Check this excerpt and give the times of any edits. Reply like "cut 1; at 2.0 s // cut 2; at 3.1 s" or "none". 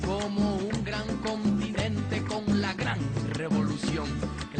none